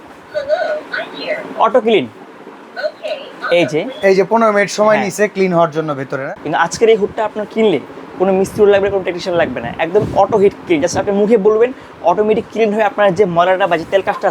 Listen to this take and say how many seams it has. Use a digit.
1